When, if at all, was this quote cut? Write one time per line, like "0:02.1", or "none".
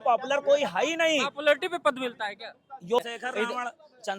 0:03.0